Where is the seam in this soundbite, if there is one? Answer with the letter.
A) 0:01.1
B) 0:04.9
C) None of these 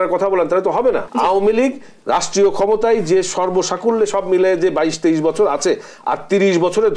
A